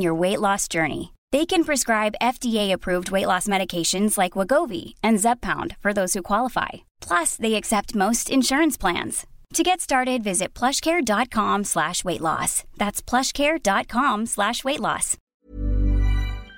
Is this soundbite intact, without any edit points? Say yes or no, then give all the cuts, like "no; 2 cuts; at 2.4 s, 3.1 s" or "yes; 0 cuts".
no; 1 cut; at 15.2 s